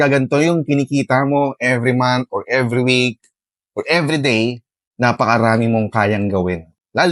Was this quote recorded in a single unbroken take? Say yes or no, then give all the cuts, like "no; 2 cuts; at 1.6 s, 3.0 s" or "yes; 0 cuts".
yes; 0 cuts